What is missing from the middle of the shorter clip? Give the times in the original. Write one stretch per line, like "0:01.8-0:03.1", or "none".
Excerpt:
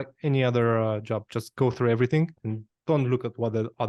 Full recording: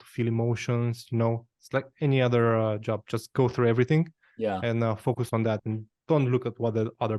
0:04.3-0:05.7